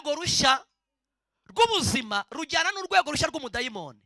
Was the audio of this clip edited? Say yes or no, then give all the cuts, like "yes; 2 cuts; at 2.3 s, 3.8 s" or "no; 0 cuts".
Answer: no; 0 cuts